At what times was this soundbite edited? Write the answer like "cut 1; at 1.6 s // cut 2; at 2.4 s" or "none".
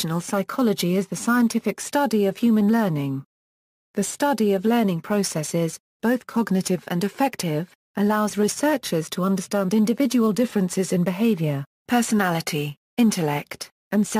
cut 1; at 0.9 s